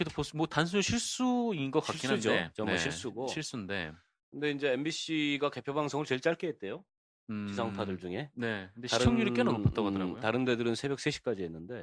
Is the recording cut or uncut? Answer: cut